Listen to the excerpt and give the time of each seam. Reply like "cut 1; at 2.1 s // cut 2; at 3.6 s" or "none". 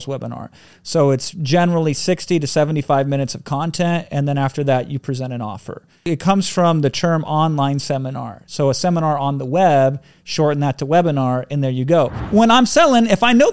cut 1; at 6.1 s // cut 2; at 12.2 s